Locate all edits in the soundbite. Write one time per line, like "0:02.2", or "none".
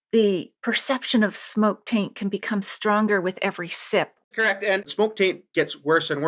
0:04.3